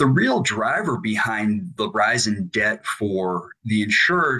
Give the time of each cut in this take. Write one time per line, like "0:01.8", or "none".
0:01.7

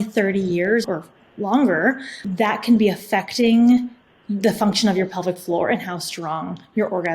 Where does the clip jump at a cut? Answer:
0:00.8
0:02.2

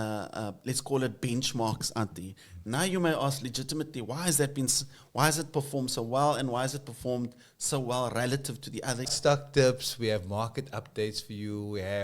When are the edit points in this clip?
0:09.1

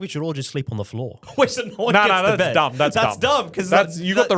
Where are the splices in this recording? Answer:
0:01.2

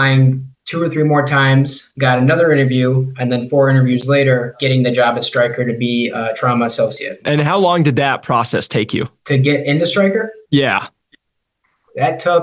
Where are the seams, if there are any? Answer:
0:04.6
0:07.2

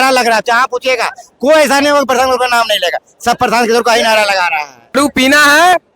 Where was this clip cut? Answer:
0:04.9

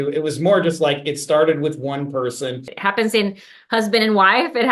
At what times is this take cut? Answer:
0:02.7

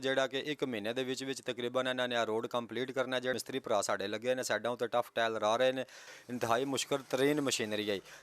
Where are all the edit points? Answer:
0:03.3
0:06.1

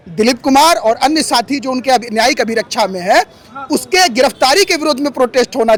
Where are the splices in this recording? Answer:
none

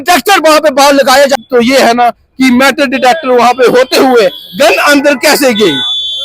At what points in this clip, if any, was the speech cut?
0:01.4

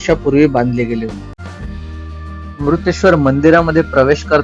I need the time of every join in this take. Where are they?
0:01.4

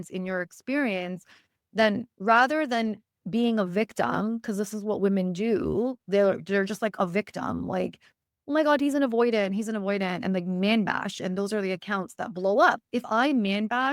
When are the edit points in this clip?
0:03.2
0:12.8

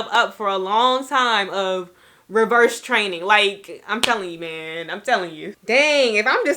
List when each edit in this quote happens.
0:05.5

